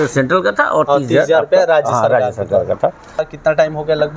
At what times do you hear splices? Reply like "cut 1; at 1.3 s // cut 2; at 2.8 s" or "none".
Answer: cut 1; at 3.3 s